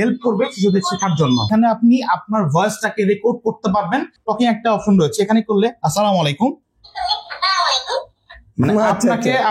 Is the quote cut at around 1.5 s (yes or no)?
yes